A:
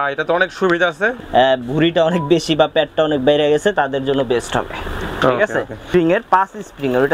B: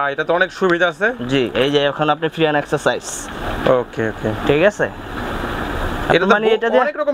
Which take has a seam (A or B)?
A